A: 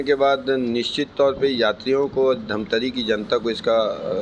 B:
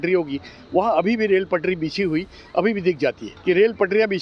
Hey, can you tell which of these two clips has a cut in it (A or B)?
B